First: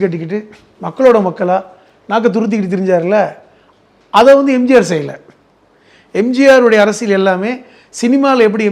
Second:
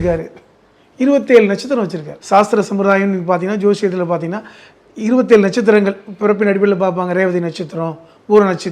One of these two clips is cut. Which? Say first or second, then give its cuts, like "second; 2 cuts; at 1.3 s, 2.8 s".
second; 1 cut; at 2.1 s